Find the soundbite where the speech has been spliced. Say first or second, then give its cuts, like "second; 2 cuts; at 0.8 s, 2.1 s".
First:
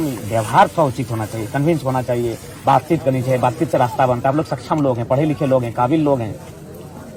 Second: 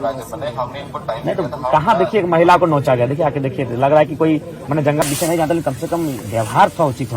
second; 1 cut; at 5.0 s